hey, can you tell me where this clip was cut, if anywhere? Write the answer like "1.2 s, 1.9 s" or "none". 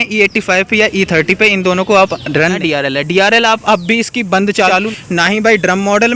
2.4 s, 4.6 s